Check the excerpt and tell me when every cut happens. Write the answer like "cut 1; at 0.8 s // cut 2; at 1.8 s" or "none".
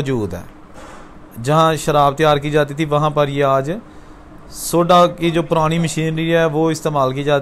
none